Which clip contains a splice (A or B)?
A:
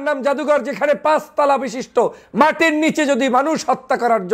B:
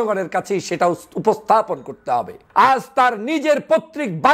B